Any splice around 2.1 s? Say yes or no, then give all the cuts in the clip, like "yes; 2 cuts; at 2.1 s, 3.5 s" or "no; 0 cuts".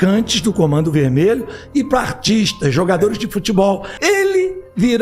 no; 1 cut; at 4.1 s